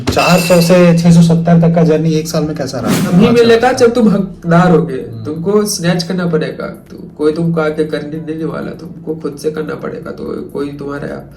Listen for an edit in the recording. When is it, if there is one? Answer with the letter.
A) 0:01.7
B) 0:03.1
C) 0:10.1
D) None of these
B